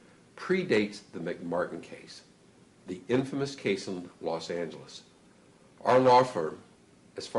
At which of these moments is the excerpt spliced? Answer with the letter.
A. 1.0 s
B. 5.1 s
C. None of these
B